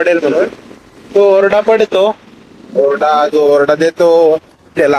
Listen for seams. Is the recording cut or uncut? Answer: uncut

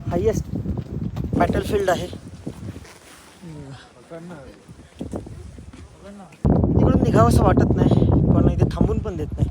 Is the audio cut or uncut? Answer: cut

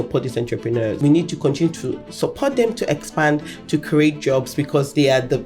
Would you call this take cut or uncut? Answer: cut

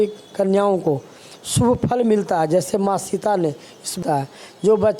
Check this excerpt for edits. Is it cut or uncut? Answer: cut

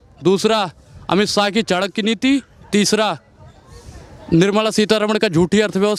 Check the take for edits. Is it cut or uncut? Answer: uncut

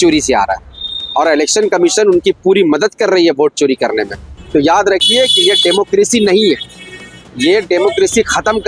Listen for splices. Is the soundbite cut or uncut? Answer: cut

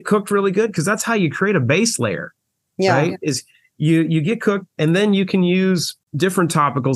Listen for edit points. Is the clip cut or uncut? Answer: cut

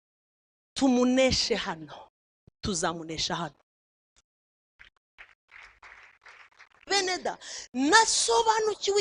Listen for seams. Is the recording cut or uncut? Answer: cut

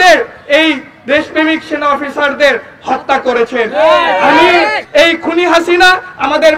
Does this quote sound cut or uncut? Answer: cut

